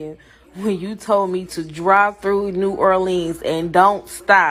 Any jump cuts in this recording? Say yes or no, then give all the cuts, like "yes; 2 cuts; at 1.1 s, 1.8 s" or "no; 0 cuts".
no; 0 cuts